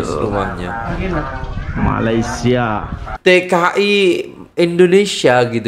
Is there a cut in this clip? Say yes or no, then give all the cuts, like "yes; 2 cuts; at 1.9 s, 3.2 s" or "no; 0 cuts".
yes; 1 cut; at 3.0 s